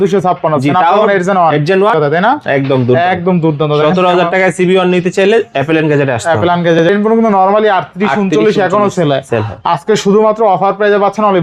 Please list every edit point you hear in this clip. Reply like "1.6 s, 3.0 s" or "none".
1.9 s, 6.8 s